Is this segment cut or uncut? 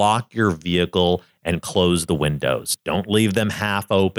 uncut